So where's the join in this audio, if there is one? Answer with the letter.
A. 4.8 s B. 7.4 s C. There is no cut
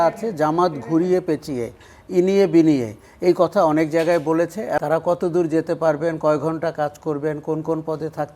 A